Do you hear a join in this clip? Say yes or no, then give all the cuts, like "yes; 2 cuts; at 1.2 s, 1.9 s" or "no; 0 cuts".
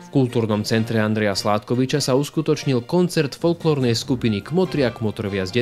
no; 0 cuts